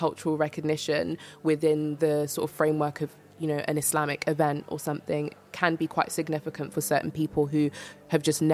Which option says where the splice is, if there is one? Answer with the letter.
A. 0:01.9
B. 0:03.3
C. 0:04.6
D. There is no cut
A